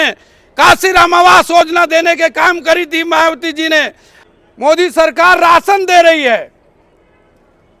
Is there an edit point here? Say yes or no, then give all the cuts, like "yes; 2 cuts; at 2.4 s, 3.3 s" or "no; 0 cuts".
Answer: yes; 1 cut; at 4.2 s